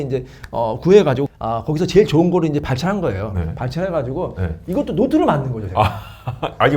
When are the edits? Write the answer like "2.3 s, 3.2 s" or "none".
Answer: 1.3 s